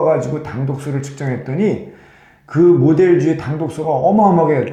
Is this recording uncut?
yes; 0 cuts

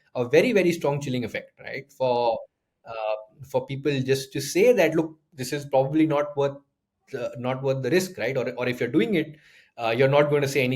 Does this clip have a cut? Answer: no; 0 cuts

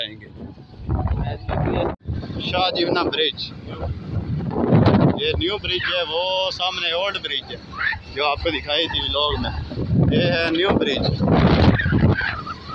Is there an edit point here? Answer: yes; 1 cut; at 2.1 s

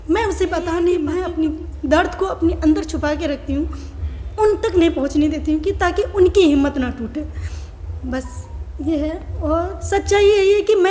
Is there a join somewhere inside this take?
yes; 1 cut; at 1.1 s

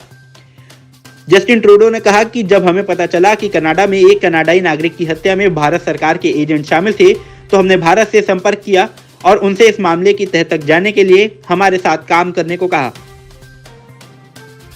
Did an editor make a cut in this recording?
yes; 1 cut; at 12.9 s

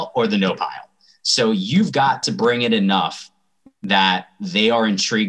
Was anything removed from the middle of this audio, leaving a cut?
yes; 1 cut; at 2.2 s

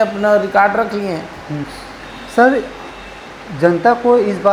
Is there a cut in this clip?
yes; 1 cut; at 1.6 s

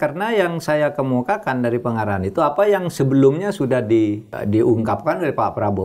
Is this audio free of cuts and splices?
no; 1 cut; at 4.4 s

